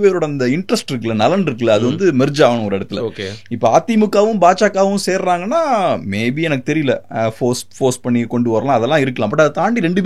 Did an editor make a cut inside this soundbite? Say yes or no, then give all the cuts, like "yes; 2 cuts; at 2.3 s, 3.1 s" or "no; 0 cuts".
no; 0 cuts